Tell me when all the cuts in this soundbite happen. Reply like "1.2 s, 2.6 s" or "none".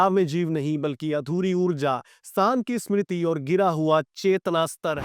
none